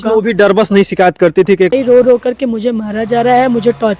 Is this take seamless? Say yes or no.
no